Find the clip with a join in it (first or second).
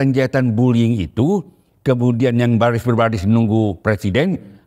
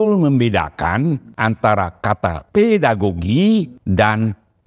second